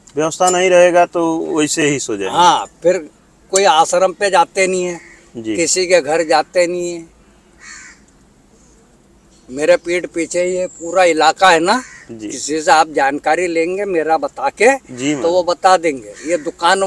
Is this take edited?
no; 0 cuts

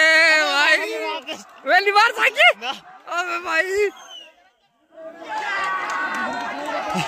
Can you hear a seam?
no; 0 cuts

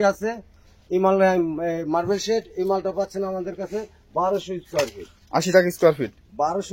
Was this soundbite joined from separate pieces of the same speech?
no; 0 cuts

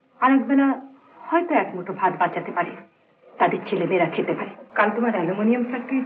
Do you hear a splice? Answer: yes; 1 cut; at 4.6 s

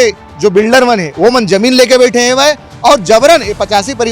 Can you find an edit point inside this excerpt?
no; 0 cuts

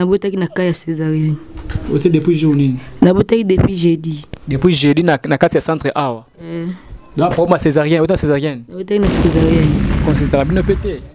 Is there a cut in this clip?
yes; 1 cut; at 10.0 s

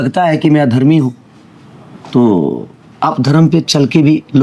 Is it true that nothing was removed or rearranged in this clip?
yes; 0 cuts

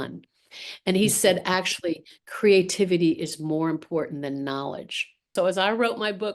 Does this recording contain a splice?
yes; 1 cut; at 5.3 s

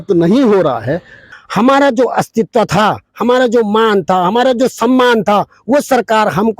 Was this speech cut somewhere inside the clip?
yes; 1 cut; at 1.2 s

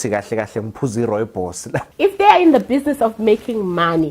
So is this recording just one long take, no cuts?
no; 1 cut; at 1.8 s

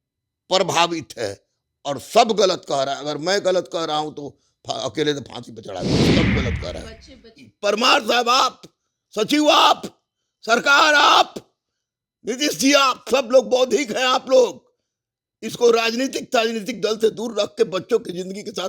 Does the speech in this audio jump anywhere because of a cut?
yes; 1 cut; at 7.5 s

